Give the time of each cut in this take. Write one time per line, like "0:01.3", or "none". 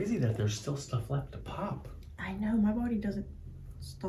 none